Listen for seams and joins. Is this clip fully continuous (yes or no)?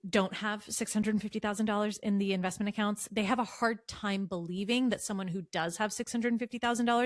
yes